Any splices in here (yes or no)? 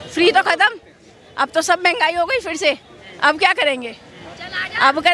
no